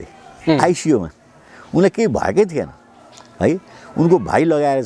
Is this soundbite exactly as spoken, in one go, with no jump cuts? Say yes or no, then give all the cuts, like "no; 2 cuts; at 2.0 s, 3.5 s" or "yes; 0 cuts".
yes; 0 cuts